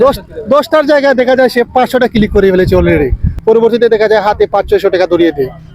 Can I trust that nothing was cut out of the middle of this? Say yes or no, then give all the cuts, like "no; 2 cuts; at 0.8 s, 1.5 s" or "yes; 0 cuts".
no; 1 cut; at 3.3 s